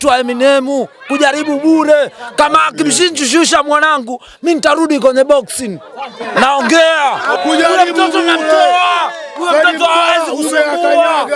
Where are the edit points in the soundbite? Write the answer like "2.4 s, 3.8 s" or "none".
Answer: none